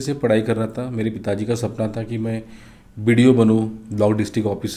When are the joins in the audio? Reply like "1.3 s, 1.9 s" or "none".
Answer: none